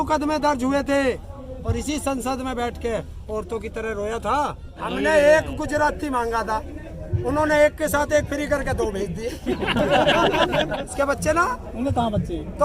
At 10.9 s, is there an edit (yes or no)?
yes